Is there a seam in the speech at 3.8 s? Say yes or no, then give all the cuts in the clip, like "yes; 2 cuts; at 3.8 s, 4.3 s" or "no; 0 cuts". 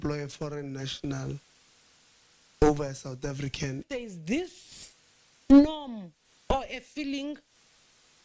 yes; 1 cut; at 3.8 s